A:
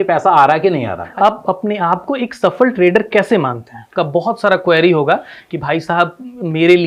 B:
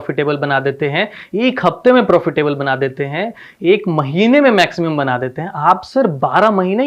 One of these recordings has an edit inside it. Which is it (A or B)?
A